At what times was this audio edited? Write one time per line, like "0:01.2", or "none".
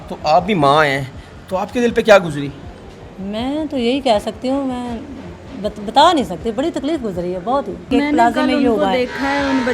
0:07.9